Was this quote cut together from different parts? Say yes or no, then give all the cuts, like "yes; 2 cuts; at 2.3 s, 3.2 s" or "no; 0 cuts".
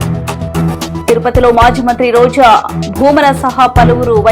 yes; 1 cut; at 1.0 s